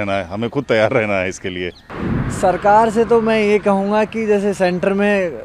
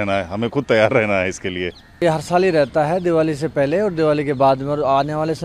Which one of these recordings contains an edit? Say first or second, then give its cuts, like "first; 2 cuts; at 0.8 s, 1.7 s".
first; 1 cut; at 1.8 s